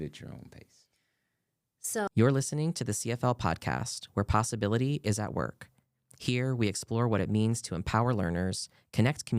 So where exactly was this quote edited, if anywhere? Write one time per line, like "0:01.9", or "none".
0:02.1

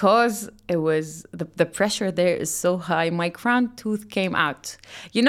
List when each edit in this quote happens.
none

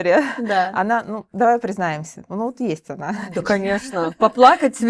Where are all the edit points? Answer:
none

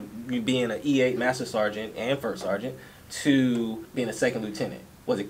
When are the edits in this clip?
0:03.8

